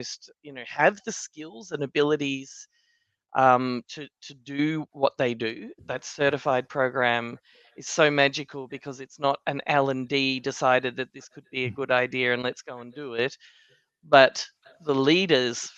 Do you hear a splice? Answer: yes; 1 cut; at 5.8 s

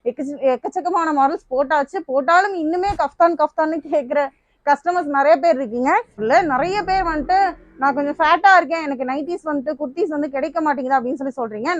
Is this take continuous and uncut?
no; 1 cut; at 6.2 s

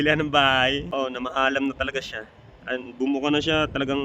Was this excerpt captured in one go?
no; 1 cut; at 0.9 s

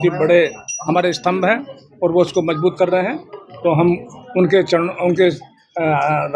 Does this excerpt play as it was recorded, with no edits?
yes; 0 cuts

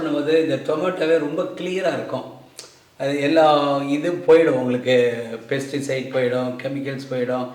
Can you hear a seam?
no; 0 cuts

